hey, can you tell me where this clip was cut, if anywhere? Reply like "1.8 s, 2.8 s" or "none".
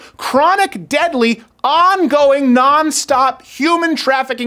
none